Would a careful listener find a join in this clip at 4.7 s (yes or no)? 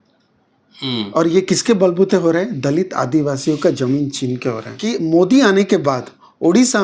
yes